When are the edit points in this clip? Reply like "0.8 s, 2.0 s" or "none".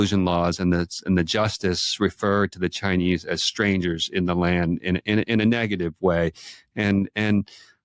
none

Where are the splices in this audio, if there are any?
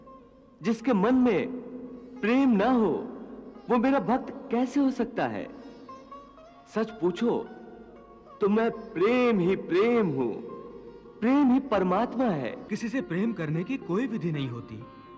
12.8 s

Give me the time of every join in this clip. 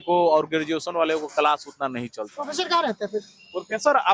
2.4 s

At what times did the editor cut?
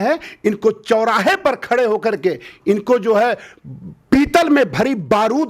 none

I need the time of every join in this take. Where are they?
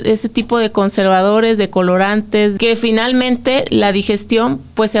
2.5 s

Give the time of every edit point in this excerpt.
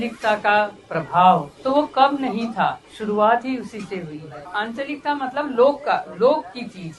1.5 s, 2.9 s, 4.4 s

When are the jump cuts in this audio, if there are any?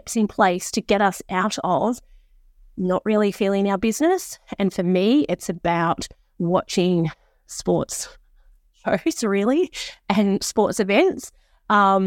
none

